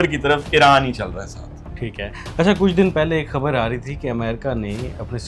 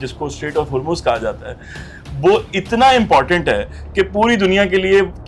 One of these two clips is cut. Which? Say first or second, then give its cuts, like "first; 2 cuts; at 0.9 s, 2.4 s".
first; 1 cut; at 2.2 s